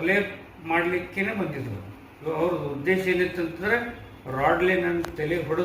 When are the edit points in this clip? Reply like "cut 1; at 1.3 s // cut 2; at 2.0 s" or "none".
cut 1; at 2.2 s